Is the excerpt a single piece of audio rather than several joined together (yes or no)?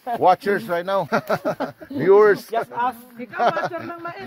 no